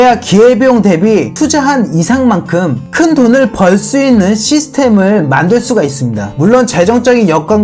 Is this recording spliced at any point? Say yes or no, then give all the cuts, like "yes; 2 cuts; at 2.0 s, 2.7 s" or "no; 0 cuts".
no; 0 cuts